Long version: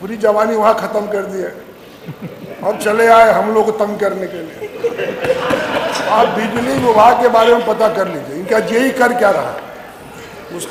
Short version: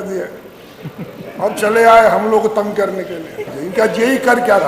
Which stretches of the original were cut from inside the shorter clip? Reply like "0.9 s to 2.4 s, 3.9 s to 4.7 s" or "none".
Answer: 4.7 s to 8.2 s